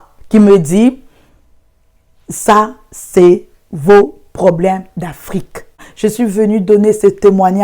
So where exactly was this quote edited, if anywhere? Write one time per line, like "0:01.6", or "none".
0:05.9